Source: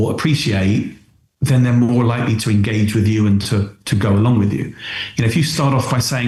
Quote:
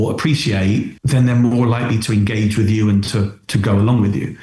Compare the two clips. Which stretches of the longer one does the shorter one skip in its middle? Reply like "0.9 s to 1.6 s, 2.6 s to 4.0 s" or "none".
1.0 s to 1.3 s